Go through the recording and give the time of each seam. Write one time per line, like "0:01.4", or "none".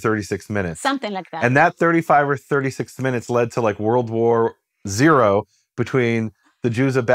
none